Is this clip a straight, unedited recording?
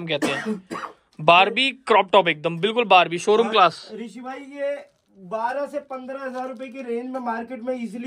yes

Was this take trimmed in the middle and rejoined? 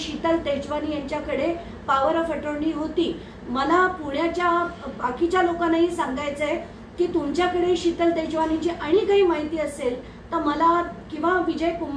no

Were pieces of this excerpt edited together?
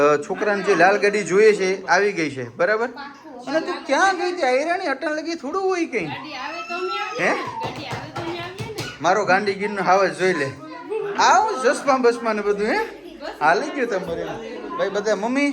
no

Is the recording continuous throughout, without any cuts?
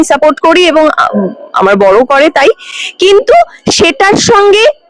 yes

